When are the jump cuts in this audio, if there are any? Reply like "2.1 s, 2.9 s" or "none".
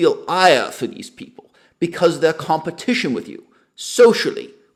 none